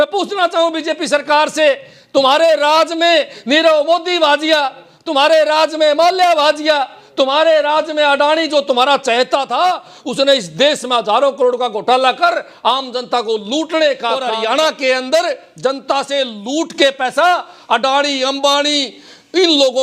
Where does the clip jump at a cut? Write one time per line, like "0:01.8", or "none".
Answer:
0:14.3